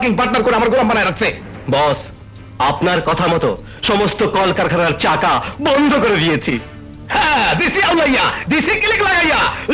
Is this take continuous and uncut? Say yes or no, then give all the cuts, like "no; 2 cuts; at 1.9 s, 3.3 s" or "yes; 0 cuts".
yes; 0 cuts